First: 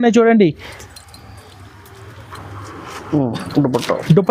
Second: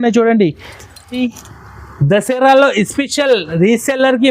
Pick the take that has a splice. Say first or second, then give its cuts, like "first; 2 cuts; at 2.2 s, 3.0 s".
second; 1 cut; at 1.2 s